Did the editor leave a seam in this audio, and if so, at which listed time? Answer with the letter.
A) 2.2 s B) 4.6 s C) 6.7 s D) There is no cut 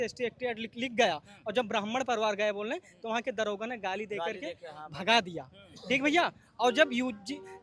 D